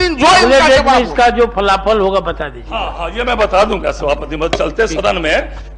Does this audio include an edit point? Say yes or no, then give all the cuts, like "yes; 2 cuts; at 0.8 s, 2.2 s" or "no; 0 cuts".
no; 0 cuts